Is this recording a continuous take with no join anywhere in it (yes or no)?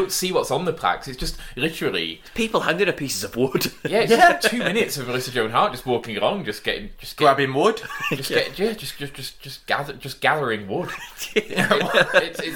yes